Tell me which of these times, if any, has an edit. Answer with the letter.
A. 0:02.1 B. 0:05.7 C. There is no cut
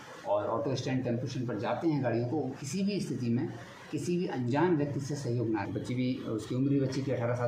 B